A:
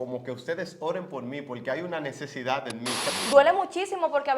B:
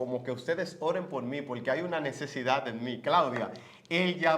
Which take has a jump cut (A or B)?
A